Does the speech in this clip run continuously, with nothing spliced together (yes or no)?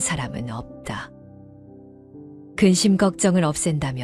no